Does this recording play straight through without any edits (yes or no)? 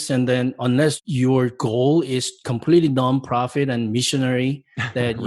no